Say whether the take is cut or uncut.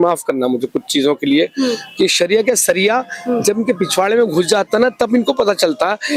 uncut